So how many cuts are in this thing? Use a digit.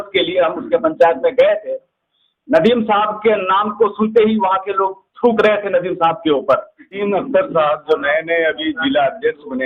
1